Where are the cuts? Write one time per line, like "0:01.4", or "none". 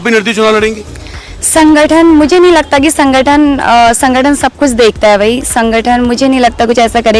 none